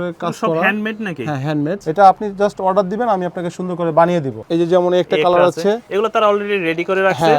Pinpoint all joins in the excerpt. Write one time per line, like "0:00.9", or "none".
0:01.8
0:04.4